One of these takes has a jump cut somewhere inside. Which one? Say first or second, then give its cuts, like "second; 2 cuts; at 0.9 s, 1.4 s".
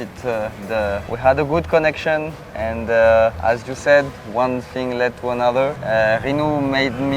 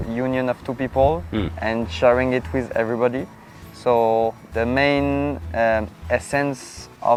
first; 3 cuts; at 1.1 s, 3.4 s, 5.8 s